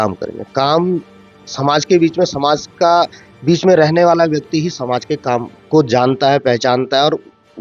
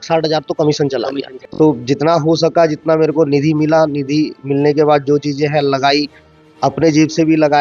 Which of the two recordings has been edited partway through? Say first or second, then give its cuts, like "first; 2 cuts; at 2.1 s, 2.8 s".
second; 1 cut; at 1.4 s